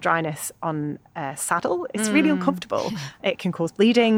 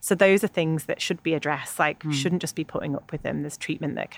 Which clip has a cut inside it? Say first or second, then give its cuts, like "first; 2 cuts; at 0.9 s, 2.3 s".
first; 1 cut; at 3.2 s